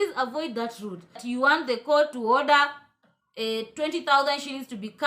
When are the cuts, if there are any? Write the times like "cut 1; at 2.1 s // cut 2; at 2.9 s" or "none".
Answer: cut 1; at 1.2 s